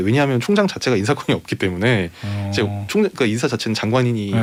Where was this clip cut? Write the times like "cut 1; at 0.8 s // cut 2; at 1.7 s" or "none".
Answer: none